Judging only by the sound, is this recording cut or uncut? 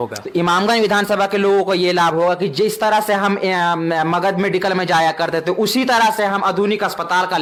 uncut